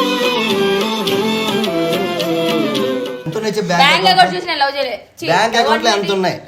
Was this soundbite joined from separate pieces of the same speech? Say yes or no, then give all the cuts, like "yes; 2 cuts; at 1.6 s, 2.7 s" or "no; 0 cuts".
yes; 1 cut; at 3.1 s